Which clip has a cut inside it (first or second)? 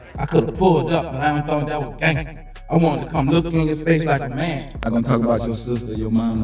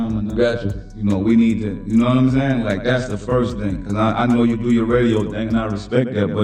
first